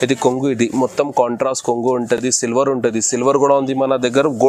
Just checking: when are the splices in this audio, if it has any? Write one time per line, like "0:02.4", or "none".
none